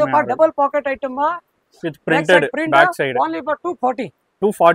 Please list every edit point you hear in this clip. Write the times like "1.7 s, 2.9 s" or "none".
none